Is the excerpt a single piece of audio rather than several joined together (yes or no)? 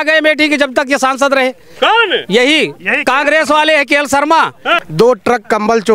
no